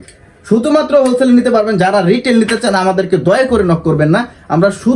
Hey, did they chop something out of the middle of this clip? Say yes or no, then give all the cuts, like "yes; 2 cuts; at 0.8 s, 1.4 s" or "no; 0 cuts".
no; 0 cuts